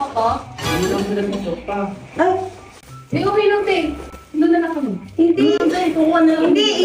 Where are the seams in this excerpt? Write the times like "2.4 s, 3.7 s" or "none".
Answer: none